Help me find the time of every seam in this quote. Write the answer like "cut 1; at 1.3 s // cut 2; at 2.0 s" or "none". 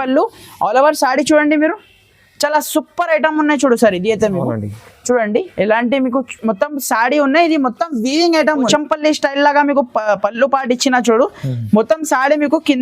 cut 1; at 8.7 s